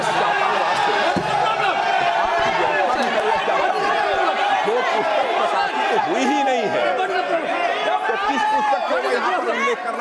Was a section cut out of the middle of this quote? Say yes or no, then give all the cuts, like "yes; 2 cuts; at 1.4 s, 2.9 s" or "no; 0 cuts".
no; 0 cuts